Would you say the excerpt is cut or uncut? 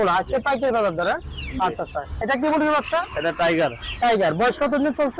uncut